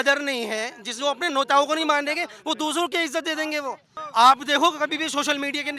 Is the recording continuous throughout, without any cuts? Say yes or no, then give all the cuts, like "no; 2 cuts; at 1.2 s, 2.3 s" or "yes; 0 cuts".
yes; 0 cuts